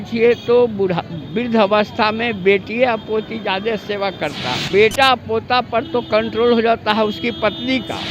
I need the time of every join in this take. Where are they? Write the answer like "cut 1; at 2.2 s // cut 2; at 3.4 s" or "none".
cut 1; at 4.6 s